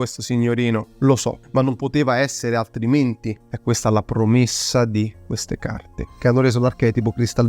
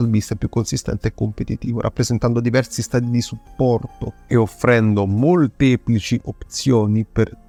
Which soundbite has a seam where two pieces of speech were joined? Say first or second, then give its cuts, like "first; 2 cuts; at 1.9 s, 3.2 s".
first; 1 cut; at 3.4 s